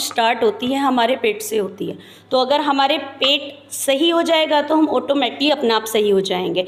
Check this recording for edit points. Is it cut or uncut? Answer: uncut